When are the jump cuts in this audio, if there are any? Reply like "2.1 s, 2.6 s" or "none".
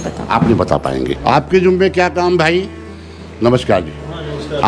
none